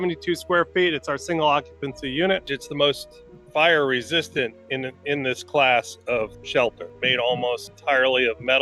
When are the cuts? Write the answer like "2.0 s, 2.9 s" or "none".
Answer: 2.5 s, 7.7 s